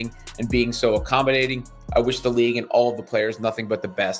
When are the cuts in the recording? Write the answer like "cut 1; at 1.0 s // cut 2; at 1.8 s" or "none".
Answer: none